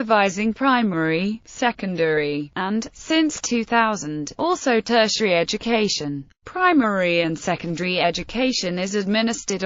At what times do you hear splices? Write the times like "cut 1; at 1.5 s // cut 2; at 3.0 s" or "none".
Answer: cut 1; at 1.9 s